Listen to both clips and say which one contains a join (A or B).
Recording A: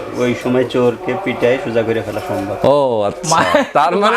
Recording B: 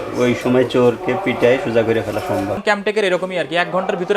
B